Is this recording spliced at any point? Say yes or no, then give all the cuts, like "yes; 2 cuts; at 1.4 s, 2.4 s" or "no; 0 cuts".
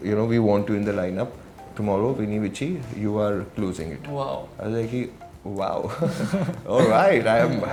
no; 0 cuts